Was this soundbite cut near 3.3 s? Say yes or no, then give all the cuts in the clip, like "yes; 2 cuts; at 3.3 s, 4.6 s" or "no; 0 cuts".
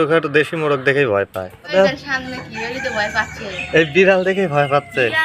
no; 1 cut; at 1.7 s